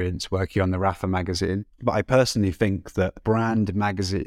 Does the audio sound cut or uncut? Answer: cut